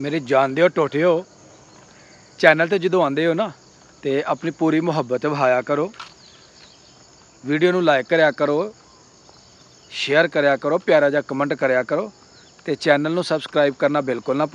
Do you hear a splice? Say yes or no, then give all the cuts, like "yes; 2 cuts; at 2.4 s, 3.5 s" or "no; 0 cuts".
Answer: no; 0 cuts